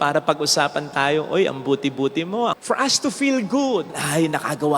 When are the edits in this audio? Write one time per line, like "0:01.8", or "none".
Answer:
0:02.6
0:04.0